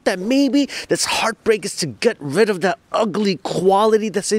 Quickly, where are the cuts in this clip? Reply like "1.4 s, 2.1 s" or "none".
none